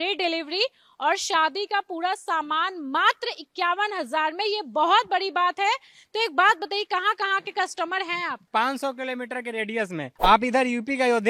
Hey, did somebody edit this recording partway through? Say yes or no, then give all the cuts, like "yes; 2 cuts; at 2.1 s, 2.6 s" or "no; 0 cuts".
no; 0 cuts